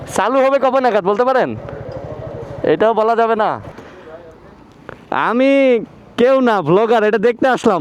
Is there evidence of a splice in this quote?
yes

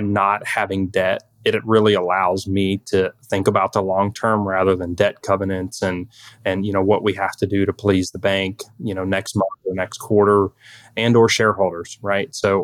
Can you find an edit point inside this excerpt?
no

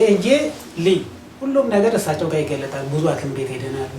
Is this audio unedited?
no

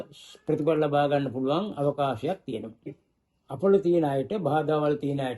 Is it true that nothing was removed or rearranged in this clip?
no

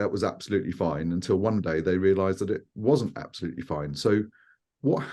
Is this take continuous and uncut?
yes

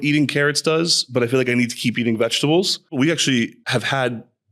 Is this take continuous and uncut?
no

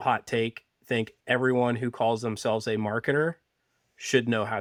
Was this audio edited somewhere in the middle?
no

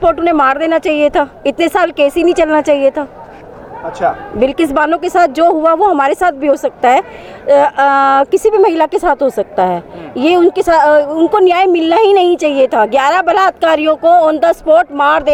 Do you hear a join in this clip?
no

